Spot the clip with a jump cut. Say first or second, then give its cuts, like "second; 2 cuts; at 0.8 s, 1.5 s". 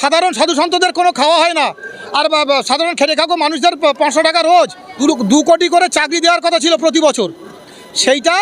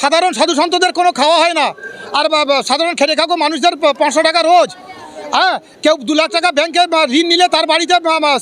first; 1 cut; at 4.9 s